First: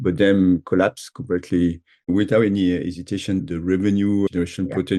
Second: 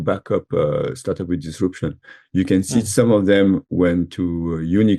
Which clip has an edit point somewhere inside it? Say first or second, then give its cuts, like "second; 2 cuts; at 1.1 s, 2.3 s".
first; 1 cut; at 1.9 s